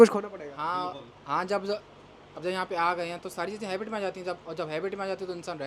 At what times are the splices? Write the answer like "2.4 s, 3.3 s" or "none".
none

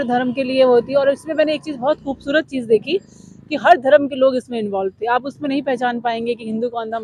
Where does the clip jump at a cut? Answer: none

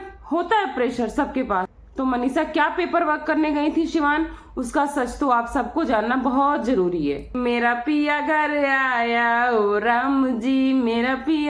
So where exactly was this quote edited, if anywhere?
1.8 s, 7.3 s

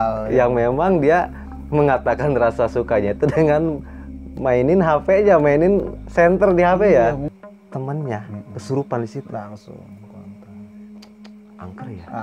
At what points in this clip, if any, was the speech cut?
7.2 s

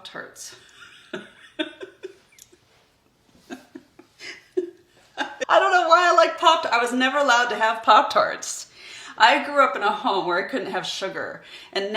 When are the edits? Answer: 5.4 s

